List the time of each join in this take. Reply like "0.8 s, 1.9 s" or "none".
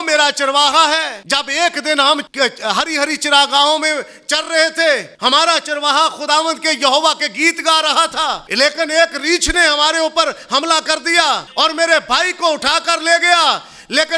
1.2 s, 2.3 s, 5.1 s, 8.5 s, 11.5 s